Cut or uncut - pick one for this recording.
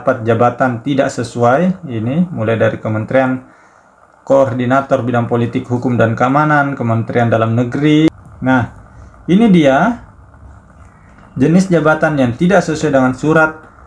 cut